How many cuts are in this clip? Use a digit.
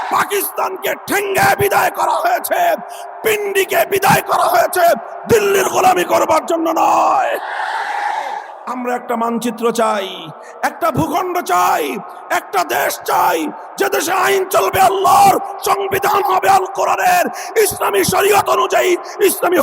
1